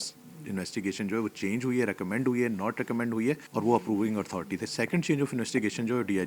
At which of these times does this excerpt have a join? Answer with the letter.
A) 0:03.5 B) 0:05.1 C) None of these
A